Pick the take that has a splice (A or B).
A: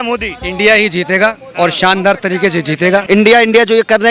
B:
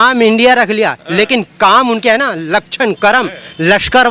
A